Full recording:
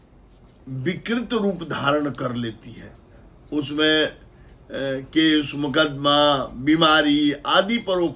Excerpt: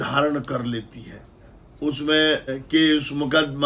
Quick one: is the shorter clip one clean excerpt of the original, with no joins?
no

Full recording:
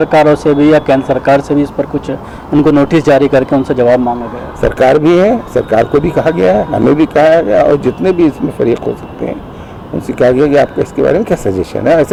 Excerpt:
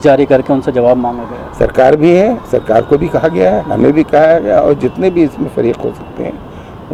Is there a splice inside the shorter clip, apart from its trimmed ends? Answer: no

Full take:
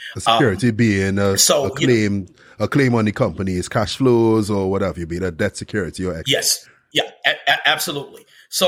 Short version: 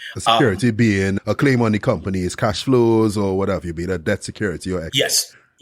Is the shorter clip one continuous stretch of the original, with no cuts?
no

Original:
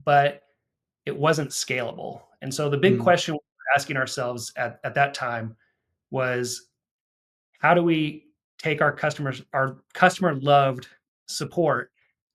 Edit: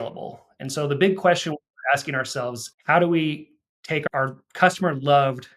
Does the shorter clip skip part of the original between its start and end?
yes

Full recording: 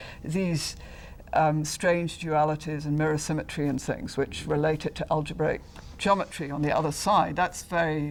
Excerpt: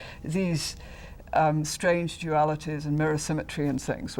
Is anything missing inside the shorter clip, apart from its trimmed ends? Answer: no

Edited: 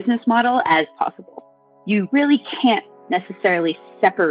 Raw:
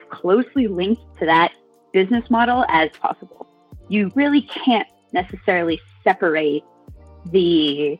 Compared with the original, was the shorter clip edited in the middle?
no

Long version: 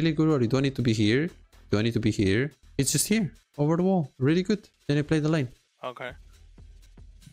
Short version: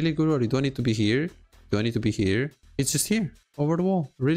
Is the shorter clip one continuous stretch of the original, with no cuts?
yes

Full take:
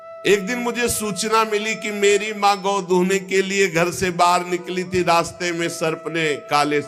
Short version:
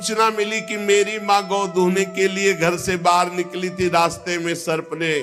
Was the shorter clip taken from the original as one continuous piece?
yes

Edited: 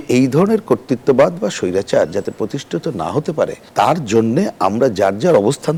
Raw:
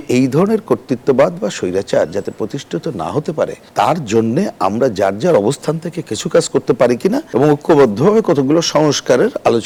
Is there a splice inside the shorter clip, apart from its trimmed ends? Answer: no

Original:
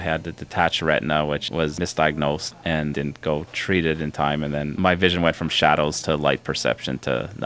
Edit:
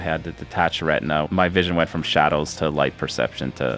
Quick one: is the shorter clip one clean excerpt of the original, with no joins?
no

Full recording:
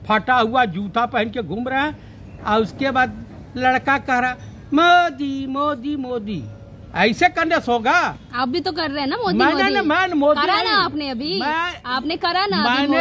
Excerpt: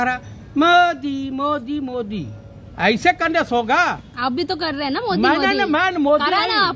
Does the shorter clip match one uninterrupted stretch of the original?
yes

